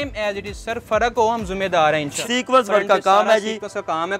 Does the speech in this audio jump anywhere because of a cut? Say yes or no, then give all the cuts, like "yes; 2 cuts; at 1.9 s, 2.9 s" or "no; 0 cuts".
yes; 1 cut; at 2.1 s